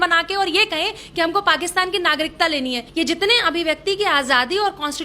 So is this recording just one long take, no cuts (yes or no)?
no